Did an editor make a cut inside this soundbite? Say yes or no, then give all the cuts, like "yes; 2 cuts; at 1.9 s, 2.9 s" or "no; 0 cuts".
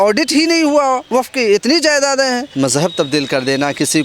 yes; 2 cuts; at 1.0 s, 2.5 s